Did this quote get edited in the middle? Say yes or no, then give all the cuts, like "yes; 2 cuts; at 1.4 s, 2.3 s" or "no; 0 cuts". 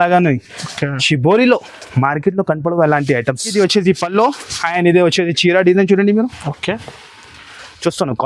yes; 1 cut; at 3.5 s